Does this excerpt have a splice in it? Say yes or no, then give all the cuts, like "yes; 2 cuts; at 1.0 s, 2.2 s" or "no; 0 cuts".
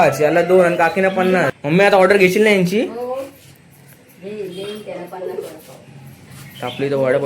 yes; 1 cut; at 1.6 s